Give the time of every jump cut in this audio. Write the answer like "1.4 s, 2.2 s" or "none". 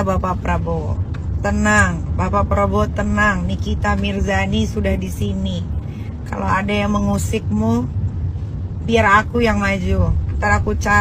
none

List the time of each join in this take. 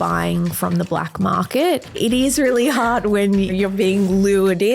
1.9 s, 3.5 s

